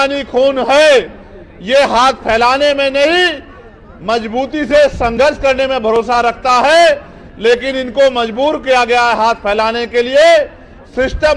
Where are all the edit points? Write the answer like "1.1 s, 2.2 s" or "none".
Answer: none